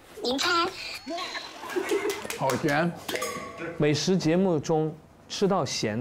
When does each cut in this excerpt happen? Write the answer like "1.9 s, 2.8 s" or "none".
2.2 s

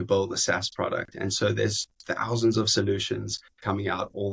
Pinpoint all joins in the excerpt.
none

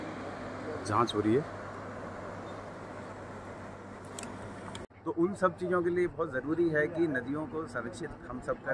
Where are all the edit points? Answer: 4.9 s

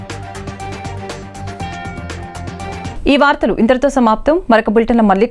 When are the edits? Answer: none

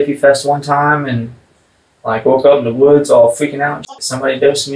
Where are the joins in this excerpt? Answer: 3.9 s

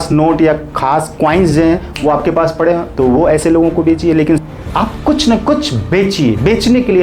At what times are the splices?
4.4 s

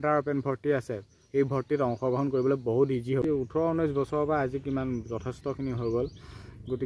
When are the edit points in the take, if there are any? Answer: 3.2 s

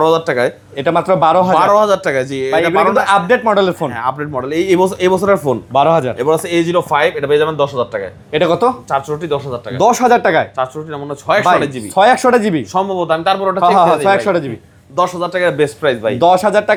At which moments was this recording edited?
none

